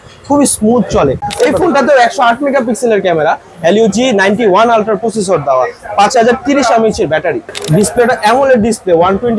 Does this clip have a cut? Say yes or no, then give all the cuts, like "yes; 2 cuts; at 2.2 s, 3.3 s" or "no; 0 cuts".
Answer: yes; 2 cuts; at 1.2 s, 7.5 s